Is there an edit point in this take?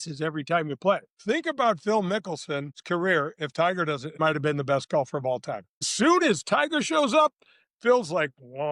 yes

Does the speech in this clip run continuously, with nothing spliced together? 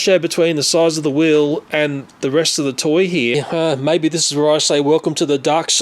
no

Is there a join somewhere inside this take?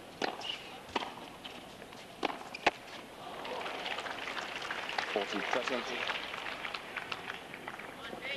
no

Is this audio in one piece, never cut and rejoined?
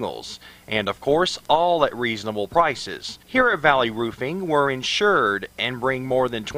no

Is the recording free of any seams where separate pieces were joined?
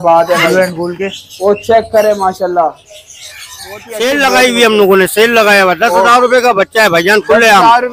no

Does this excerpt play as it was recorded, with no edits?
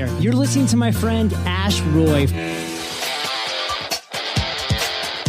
yes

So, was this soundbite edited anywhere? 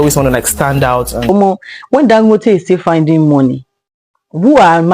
yes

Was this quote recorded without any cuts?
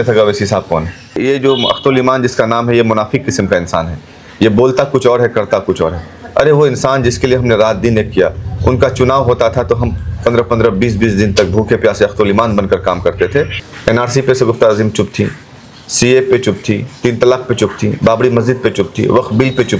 no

